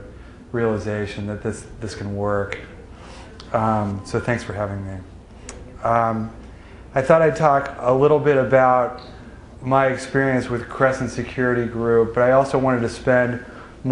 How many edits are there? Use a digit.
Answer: 1